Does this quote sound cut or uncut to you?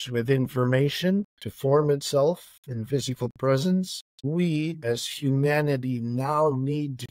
cut